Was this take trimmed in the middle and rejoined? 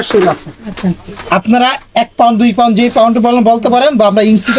no; 0 cuts

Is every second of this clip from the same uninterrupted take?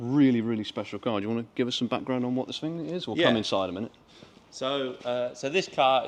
yes; 0 cuts

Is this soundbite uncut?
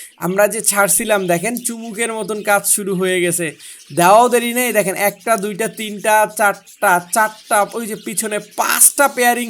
yes; 0 cuts

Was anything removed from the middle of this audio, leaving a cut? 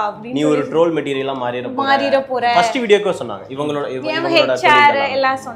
no; 0 cuts

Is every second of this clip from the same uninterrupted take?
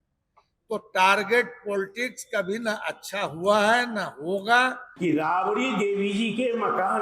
no; 1 cut; at 4.8 s

